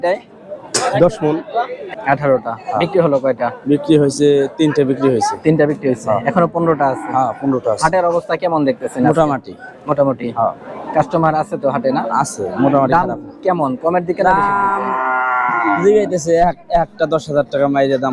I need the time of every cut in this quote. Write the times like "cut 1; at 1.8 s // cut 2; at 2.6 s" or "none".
cut 1; at 1.8 s

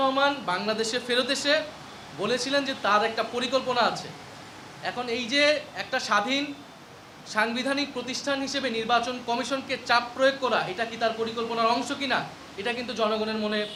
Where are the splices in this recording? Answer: none

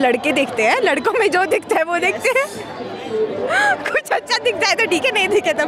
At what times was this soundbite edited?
none

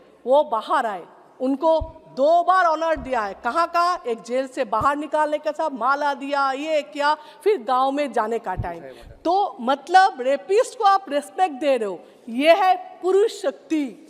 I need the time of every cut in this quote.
none

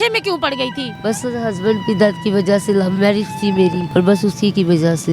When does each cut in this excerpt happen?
cut 1; at 0.9 s // cut 2; at 3.8 s

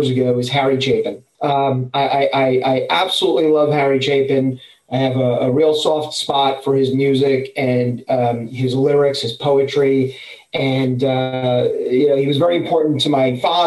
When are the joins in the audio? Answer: cut 1; at 1.2 s

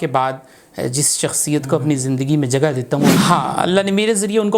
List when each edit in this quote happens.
cut 1; at 3.2 s

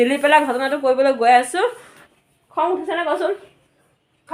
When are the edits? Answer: none

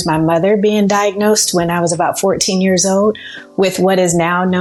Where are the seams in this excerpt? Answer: none

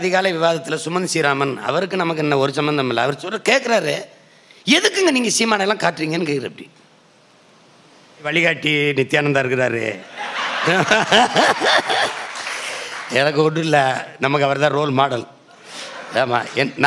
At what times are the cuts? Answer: cut 1; at 8.3 s

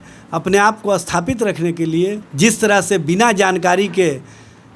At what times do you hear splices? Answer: cut 1; at 2.2 s

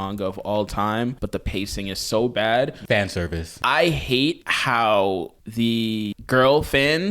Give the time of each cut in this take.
cut 1; at 1.2 s // cut 2; at 3.0 s // cut 3; at 4.5 s // cut 4; at 5.4 s // cut 5; at 6.1 s

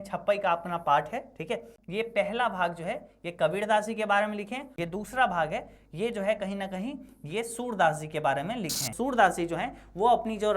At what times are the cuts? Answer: cut 1; at 1.8 s // cut 2; at 4.7 s // cut 3; at 8.9 s

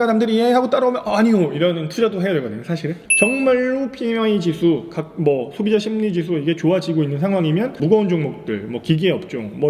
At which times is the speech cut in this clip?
cut 1; at 2.7 s // cut 2; at 7.7 s

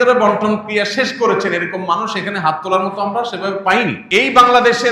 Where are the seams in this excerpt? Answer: cut 1; at 4.0 s

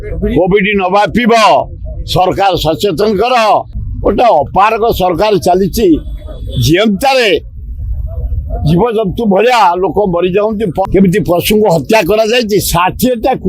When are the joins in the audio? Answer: cut 1; at 3.8 s // cut 2; at 10.8 s

